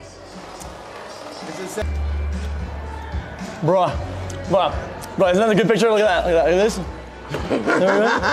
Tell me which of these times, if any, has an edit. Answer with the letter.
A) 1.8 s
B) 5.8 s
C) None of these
A